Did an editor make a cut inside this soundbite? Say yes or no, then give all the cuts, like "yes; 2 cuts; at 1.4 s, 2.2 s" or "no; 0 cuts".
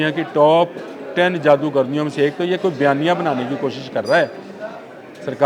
no; 0 cuts